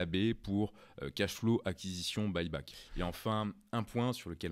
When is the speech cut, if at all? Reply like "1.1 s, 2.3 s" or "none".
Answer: 2.8 s